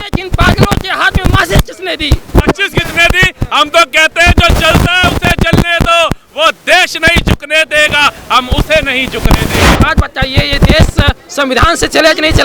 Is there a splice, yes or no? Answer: yes